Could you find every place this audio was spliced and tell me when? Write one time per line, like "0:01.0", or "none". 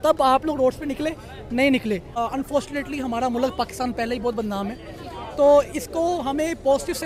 0:02.1